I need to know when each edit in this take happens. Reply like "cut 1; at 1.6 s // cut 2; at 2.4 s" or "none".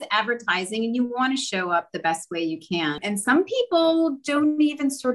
cut 1; at 3.0 s